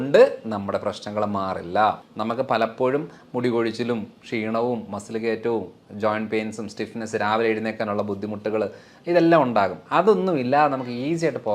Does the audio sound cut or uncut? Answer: cut